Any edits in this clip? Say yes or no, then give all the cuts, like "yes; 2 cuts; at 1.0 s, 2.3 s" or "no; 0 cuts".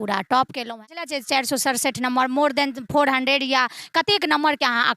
yes; 1 cut; at 1.1 s